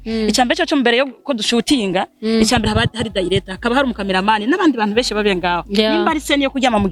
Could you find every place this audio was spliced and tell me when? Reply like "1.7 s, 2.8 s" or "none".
none

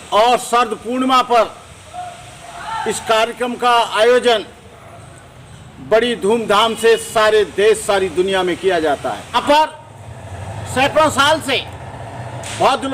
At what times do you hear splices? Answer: 9.4 s

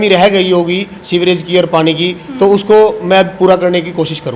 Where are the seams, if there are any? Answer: 0.9 s

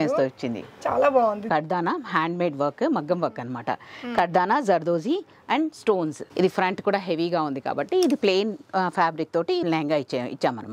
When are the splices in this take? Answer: 1.5 s, 6.2 s, 9.6 s

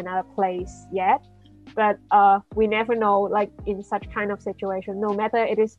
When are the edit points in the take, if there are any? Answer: none

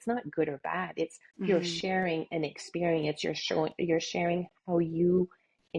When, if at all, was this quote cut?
none

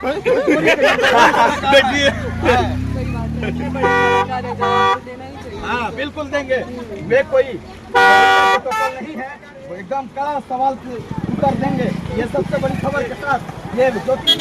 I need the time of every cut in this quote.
none

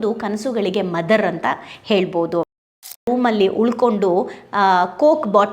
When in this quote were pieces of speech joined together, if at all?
3.0 s

